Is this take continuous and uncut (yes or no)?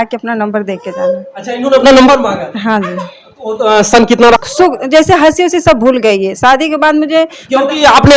no